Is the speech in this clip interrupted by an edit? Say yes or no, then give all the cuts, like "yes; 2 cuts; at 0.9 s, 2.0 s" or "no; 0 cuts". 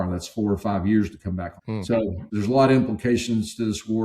yes; 1 cut; at 2.0 s